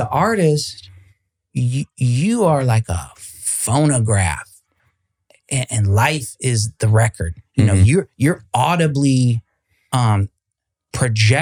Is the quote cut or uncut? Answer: uncut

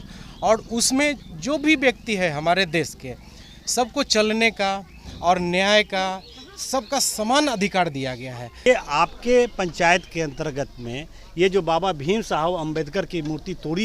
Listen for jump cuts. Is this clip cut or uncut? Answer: cut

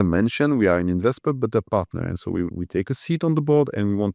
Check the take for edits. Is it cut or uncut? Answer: uncut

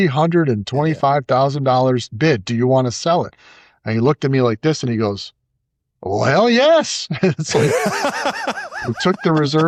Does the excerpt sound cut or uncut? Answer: uncut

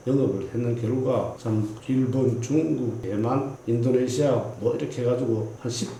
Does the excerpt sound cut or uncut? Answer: uncut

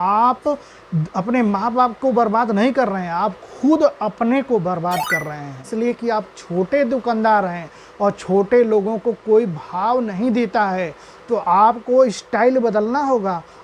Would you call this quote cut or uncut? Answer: cut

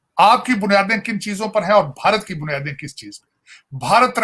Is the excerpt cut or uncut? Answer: uncut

